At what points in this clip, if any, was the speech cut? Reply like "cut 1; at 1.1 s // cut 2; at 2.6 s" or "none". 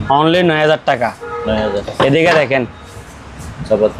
none